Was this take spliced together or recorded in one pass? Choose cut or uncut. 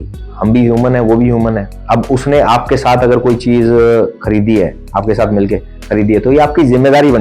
cut